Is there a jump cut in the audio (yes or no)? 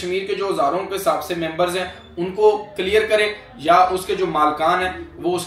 no